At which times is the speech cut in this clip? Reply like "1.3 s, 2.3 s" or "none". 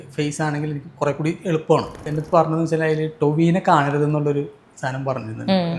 2.1 s